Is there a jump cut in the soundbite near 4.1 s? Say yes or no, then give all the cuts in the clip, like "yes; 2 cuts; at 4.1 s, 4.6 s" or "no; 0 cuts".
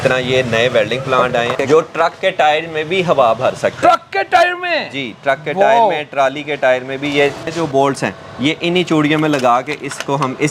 no; 2 cuts; at 1.5 s, 7.6 s